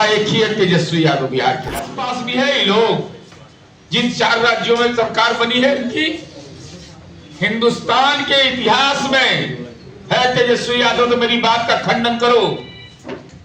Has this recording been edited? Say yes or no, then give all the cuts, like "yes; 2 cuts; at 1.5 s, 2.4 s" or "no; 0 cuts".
yes; 1 cut; at 2.0 s